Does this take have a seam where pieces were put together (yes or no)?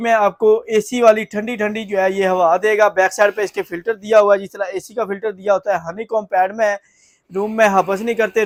no